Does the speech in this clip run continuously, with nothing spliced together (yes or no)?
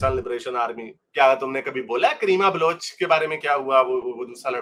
yes